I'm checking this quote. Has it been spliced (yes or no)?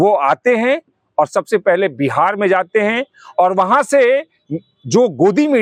no